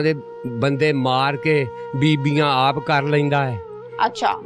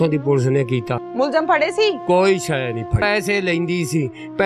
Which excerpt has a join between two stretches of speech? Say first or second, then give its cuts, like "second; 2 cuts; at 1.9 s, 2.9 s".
second; 2 cuts; at 1.0 s, 3.0 s